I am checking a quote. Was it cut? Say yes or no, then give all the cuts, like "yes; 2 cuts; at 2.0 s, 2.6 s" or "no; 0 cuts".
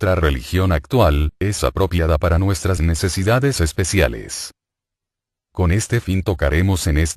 yes; 1 cut; at 3.4 s